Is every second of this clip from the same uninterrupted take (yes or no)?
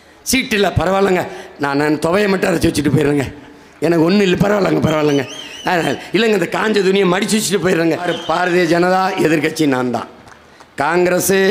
no